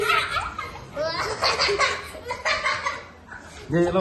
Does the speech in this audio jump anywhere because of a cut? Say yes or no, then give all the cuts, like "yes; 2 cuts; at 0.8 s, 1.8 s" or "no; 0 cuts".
no; 0 cuts